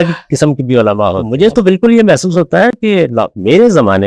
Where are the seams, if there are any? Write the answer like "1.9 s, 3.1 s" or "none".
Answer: 1.2 s